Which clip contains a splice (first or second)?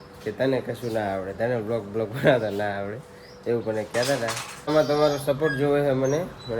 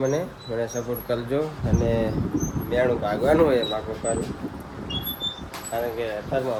first